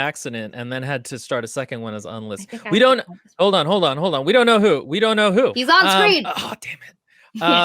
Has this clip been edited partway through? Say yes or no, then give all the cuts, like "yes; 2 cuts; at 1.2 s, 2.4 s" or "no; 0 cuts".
yes; 2 cuts; at 5.6 s, 6.3 s